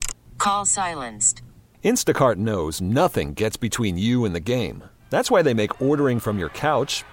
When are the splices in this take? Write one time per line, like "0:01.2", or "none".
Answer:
none